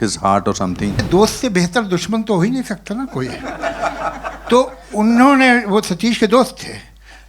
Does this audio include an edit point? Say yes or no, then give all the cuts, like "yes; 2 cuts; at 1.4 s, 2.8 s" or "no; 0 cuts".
yes; 1 cut; at 1.0 s